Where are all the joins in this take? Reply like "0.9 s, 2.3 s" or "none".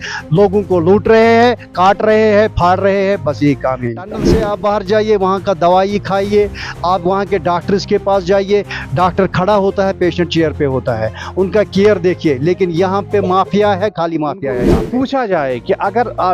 4.2 s, 14.6 s